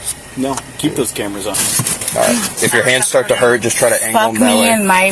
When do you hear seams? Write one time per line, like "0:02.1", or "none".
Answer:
0:01.6

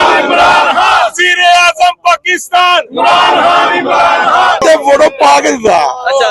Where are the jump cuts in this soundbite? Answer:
0:04.6

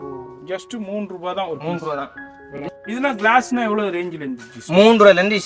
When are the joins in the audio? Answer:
0:02.6

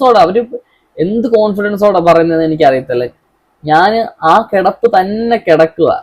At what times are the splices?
none

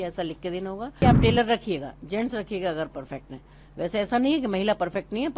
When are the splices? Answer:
0:01.0

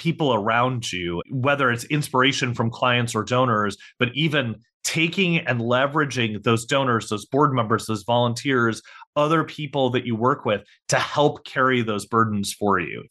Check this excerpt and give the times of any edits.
0:01.2

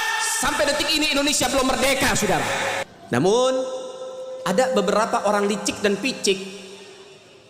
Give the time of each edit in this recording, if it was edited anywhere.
0:02.9

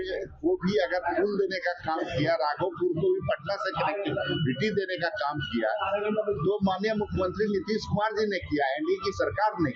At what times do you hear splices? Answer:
none

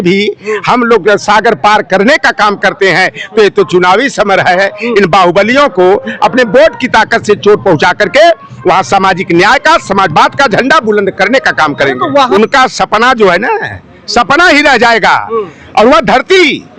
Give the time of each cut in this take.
0:12.3

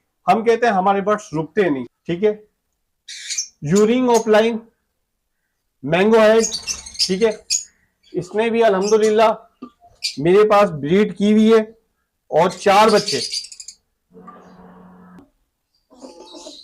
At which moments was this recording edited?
0:02.0
0:15.3

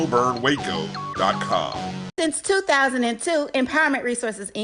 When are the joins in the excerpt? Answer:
0:01.9

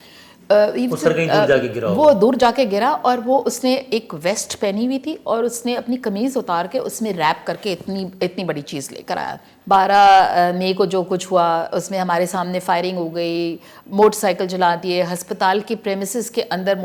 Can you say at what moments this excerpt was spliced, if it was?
0:09.5

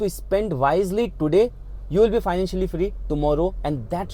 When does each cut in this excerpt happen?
none

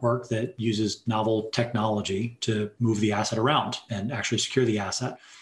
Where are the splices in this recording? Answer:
0:02.7
0:03.9

